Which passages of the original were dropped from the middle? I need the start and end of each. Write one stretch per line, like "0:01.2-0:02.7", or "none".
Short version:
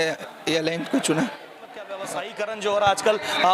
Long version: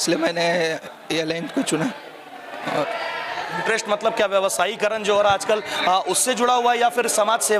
0:02.6-0:04.4